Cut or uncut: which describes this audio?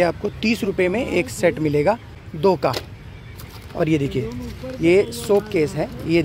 uncut